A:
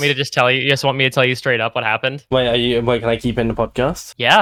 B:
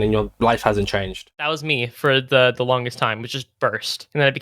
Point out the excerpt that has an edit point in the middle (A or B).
B